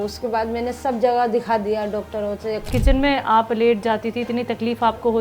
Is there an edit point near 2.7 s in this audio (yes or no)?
yes